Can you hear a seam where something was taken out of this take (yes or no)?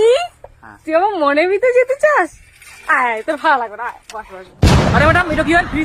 yes